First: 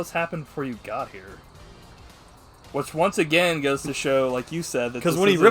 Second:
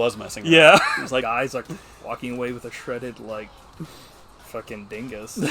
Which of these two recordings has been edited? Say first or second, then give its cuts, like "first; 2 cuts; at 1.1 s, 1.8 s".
second; 1 cut; at 1.3 s